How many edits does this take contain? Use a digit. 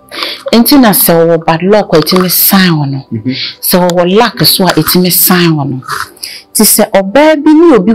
0